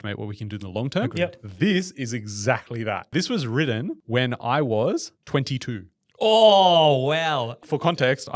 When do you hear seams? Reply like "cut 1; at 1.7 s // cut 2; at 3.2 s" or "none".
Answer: cut 1; at 3.1 s // cut 2; at 4.0 s // cut 3; at 5.2 s // cut 4; at 7.6 s